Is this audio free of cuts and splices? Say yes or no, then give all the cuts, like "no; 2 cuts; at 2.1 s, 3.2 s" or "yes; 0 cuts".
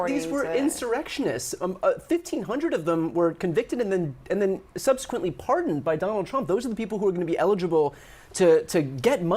no; 1 cut; at 6.4 s